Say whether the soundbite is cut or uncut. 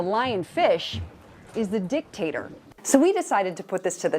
cut